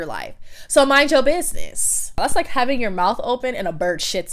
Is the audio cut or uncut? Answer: cut